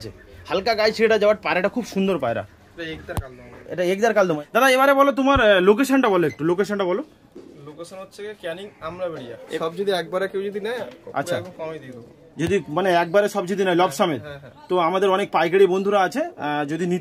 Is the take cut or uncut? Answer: cut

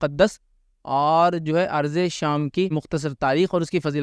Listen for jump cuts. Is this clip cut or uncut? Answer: cut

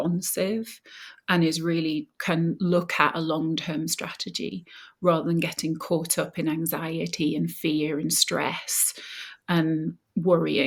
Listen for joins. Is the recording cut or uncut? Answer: uncut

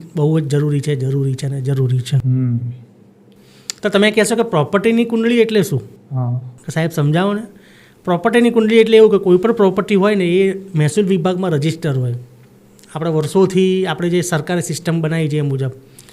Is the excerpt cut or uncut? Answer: uncut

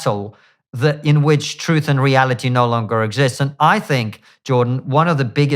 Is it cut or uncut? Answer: uncut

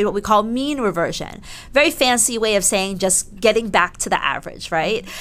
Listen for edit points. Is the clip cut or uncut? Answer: uncut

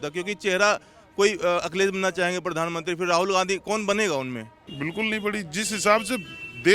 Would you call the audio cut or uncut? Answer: cut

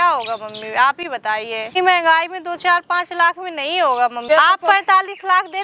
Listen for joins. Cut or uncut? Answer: cut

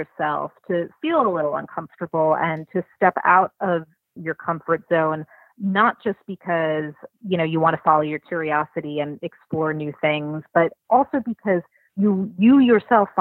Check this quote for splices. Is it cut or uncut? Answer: cut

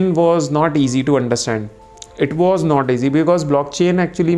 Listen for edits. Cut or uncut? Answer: uncut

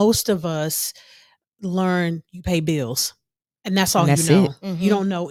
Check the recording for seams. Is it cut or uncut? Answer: uncut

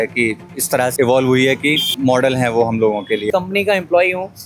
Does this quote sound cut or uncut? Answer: cut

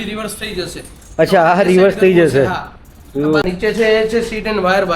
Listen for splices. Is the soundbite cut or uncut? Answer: cut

